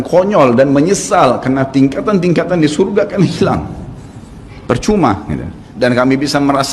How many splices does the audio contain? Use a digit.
1